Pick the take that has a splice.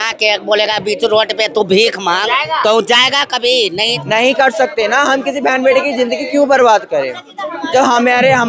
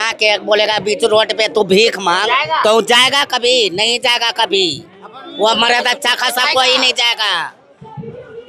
first; 1 cut; at 4.0 s

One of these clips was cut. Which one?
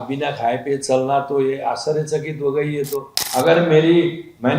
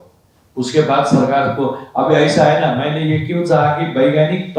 first; 1 cut; at 3.2 s

